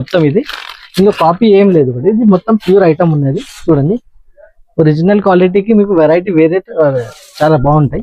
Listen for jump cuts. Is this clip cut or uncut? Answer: uncut